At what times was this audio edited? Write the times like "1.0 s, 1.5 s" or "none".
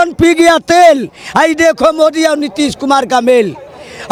none

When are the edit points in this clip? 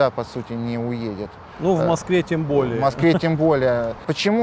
none

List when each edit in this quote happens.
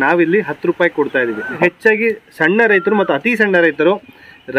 1.6 s

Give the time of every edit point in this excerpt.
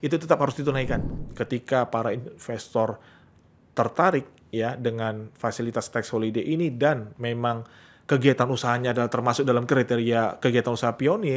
1.2 s

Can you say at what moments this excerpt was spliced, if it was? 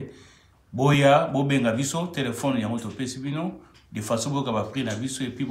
none

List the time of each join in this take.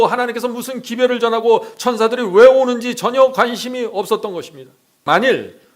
4.9 s

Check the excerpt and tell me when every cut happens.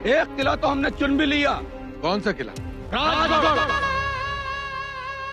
3.7 s

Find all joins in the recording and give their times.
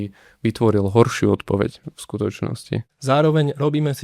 2.9 s

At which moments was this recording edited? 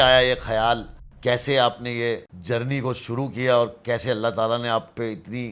none

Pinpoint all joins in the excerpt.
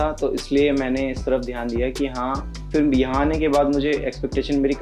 2.6 s

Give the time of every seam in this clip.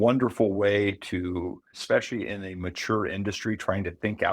1.8 s

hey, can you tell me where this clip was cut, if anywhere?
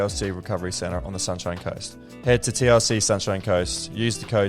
2.0 s

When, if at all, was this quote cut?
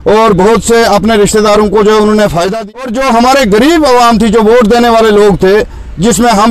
2.5 s

